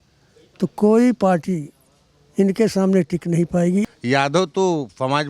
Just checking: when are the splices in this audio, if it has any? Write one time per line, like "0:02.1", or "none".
0:03.8